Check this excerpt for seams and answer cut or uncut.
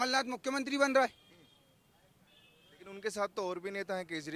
uncut